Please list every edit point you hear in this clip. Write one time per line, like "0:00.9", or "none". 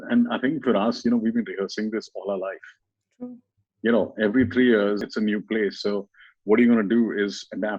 0:05.0